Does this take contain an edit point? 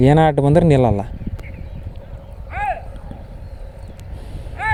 no; 0 cuts

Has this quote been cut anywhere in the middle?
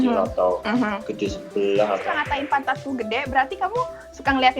yes; 1 cut; at 2.2 s

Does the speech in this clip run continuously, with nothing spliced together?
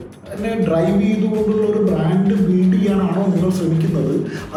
yes; 0 cuts

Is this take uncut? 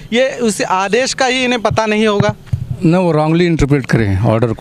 yes; 0 cuts

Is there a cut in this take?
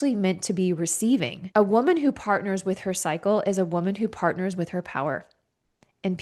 yes; 1 cut; at 1.4 s

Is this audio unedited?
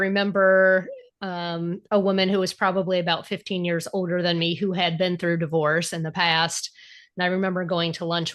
yes; 0 cuts

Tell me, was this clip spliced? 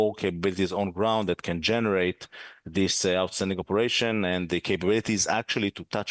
no; 0 cuts

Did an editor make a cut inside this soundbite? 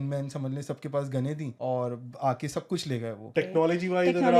yes; 2 cuts; at 1.5 s, 3.3 s

